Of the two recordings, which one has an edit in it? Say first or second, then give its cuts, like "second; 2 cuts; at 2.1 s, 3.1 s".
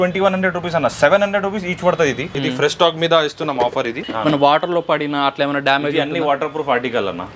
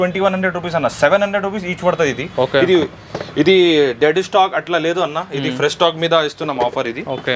first; 2 cuts; at 2.3 s, 4.0 s